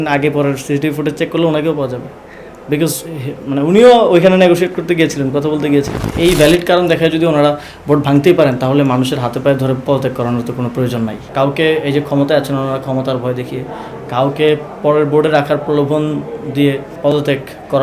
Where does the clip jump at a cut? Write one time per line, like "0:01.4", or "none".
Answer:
0:06.0
0:11.3
0:16.9